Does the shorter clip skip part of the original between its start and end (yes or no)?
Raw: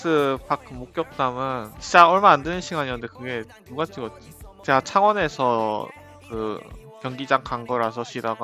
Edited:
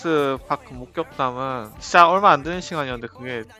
no